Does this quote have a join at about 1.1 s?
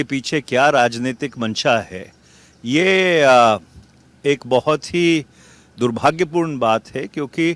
no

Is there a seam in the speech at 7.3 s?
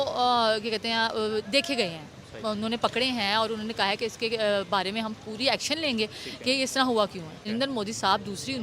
yes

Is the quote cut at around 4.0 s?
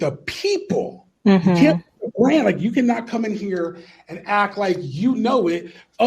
no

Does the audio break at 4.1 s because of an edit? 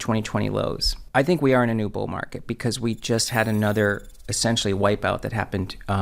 no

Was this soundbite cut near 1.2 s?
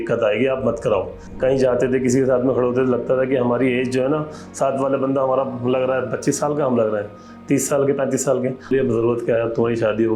yes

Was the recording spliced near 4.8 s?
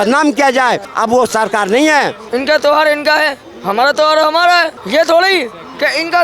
yes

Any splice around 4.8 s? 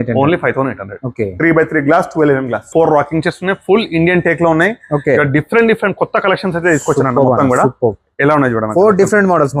no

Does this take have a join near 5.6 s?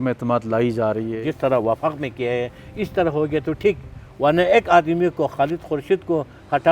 no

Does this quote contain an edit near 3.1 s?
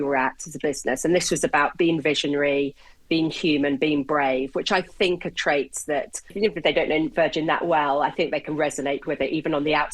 no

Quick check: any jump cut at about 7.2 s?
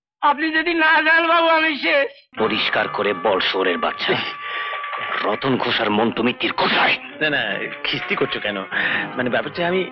no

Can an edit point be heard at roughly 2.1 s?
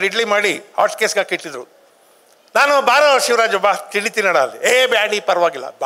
no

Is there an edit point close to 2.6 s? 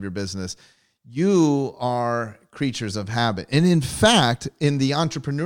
no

